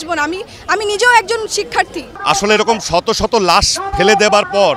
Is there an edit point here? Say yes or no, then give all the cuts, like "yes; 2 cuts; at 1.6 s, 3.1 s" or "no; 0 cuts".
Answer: yes; 1 cut; at 2.1 s